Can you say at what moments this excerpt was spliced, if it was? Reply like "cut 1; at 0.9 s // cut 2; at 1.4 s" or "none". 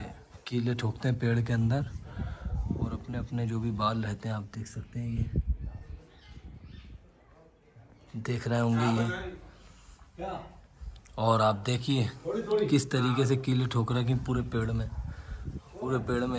none